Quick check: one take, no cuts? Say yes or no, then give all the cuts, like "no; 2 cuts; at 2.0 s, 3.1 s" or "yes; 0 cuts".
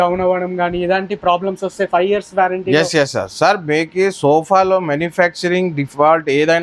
yes; 0 cuts